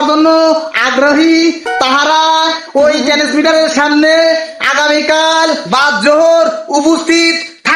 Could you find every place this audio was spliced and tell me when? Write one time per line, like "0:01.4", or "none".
0:02.6